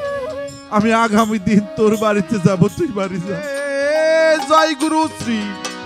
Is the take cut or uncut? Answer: cut